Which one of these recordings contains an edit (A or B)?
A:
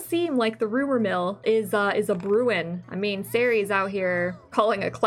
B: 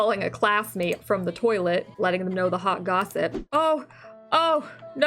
B